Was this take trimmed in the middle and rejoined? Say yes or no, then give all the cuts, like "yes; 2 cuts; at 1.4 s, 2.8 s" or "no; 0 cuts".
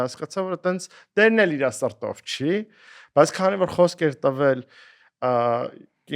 no; 0 cuts